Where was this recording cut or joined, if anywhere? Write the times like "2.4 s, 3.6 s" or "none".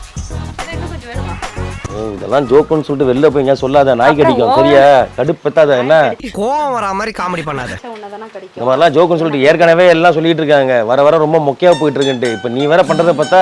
none